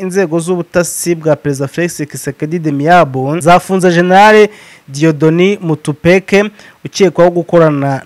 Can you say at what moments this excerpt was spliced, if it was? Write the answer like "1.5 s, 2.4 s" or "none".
3.4 s